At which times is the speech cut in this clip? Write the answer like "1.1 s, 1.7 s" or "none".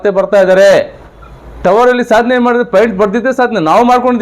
1.5 s